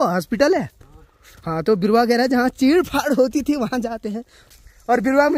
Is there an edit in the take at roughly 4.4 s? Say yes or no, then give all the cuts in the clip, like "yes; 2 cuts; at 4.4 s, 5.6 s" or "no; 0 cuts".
yes; 1 cut; at 4.4 s